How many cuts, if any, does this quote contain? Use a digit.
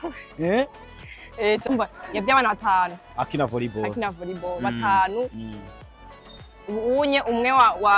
1